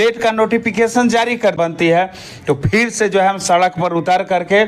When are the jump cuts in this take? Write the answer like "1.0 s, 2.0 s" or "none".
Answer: 1.6 s